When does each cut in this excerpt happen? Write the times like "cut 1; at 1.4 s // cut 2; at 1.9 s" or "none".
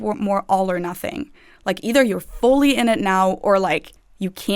none